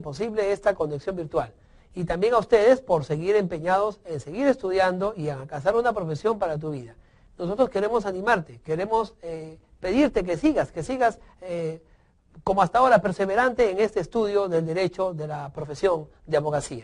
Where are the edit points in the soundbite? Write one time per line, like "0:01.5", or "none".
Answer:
none